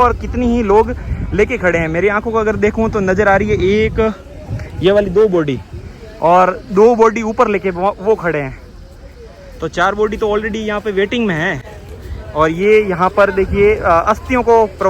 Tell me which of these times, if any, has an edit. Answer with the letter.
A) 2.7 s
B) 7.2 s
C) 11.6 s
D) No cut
D